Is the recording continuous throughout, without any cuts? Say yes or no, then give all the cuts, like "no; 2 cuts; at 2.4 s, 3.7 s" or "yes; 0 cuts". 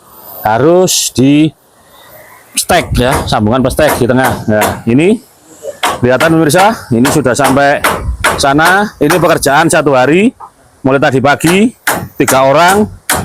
yes; 0 cuts